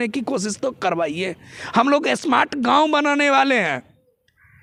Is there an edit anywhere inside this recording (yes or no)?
no